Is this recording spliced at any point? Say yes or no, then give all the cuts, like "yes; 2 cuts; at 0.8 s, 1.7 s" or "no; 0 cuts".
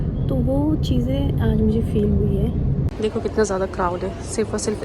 yes; 1 cut; at 2.9 s